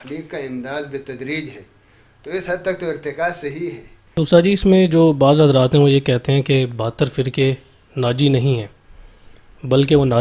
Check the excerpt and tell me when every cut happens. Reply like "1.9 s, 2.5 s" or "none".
3.9 s